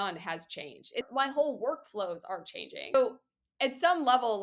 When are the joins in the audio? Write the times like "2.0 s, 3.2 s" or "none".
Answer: 1.0 s, 2.9 s